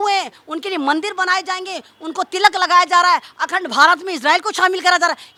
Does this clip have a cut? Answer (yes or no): no